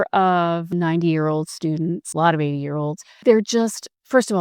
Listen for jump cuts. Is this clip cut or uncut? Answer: cut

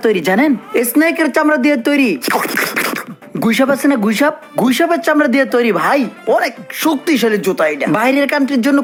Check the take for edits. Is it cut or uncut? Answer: uncut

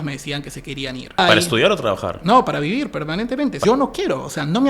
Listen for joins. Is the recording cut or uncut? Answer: cut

